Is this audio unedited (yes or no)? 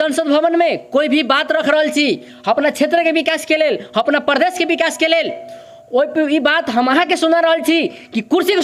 yes